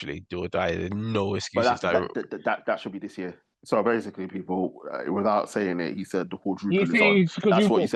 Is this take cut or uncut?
cut